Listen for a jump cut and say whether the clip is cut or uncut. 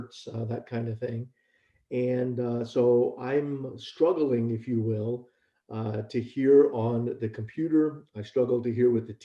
uncut